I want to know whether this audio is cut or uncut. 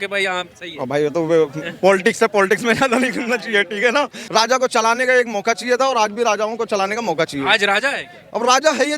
cut